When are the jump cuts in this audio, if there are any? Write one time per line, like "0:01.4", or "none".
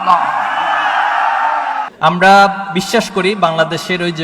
0:01.9